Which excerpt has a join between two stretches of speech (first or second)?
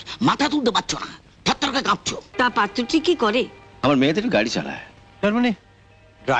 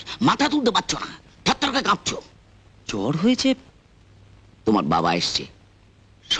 first